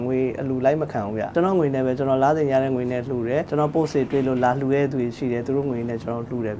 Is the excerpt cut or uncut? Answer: cut